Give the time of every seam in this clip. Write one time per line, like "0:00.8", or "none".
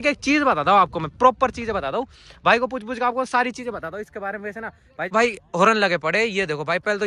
0:05.1